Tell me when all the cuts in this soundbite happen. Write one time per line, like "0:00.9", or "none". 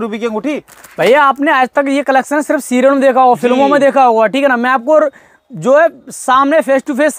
none